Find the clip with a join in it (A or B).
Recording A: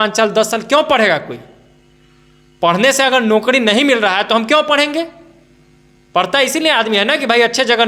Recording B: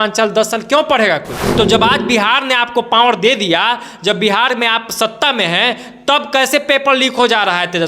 B